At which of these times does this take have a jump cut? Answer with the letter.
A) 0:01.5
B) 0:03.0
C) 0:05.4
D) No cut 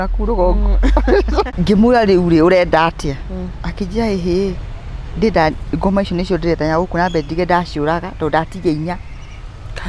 A